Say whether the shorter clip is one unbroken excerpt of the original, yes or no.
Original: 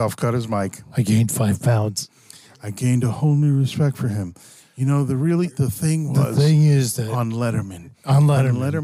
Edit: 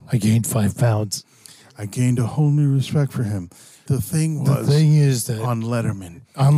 no